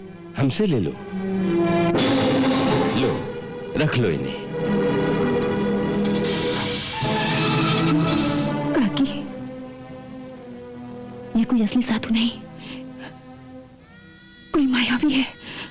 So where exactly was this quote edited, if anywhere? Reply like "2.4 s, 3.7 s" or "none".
2.9 s, 8.1 s